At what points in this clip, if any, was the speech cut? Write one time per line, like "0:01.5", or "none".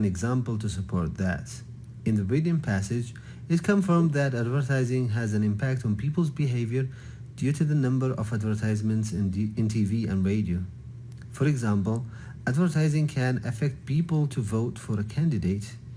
0:09.2
0:10.5
0:11.9